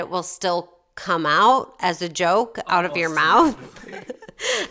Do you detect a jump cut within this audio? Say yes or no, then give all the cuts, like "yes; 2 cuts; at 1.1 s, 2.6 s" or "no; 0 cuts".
no; 0 cuts